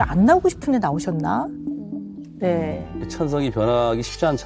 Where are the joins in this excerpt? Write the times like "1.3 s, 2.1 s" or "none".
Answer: 3.0 s